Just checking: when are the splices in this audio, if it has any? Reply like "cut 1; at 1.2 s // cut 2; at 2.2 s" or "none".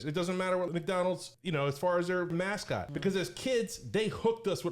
cut 1; at 0.8 s // cut 2; at 2.3 s